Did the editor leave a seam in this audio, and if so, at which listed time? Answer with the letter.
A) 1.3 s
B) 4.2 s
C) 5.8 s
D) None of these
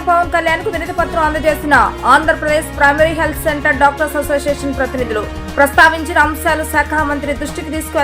D